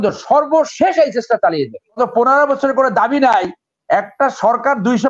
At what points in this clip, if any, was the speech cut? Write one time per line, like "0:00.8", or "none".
0:02.0